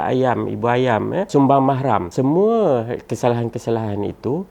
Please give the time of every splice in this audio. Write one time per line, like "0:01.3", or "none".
0:01.3
0:02.1